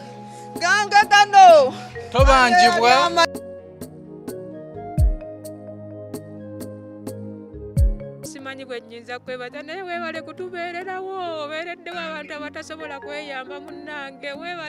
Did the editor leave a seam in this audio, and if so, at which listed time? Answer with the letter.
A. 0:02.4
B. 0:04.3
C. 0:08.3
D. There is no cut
C